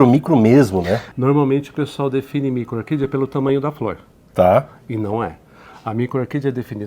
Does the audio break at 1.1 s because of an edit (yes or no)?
yes